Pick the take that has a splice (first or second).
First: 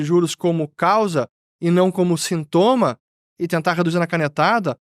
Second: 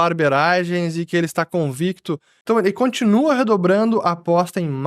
second